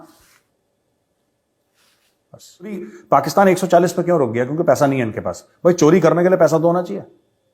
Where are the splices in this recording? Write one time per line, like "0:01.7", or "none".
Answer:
0:02.9